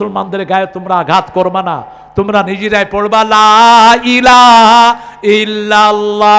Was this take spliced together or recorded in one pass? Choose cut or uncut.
uncut